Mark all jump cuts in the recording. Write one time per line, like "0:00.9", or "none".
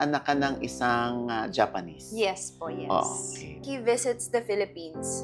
0:03.6